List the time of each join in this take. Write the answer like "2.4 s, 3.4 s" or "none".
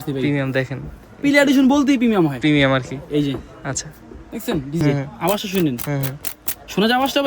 4.8 s

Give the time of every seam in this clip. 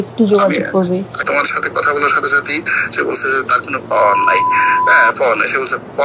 1.2 s

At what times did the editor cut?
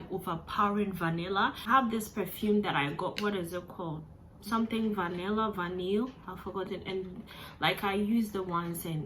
1.7 s

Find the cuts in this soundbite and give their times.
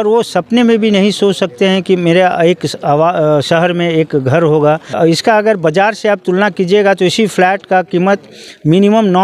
4.9 s

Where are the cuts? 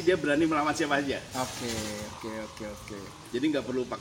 none

